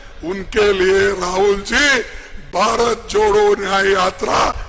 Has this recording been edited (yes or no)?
no